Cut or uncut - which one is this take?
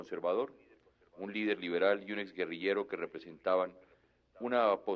uncut